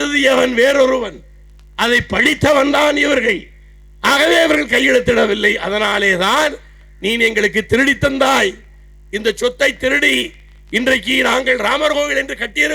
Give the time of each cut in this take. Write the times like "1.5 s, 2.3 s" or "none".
none